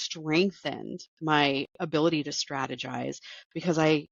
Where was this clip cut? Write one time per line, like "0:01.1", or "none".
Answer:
none